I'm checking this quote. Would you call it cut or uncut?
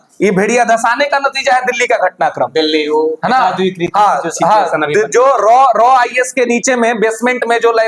uncut